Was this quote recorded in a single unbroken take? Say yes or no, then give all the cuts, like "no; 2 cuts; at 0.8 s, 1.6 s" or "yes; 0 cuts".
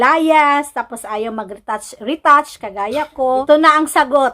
no; 1 cut; at 3.4 s